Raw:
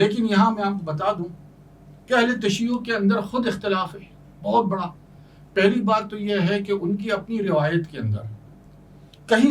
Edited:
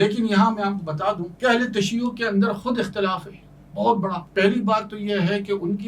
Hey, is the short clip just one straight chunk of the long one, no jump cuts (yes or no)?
no